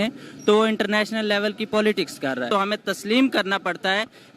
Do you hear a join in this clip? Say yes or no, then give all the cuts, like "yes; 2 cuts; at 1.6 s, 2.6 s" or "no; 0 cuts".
yes; 1 cut; at 2.5 s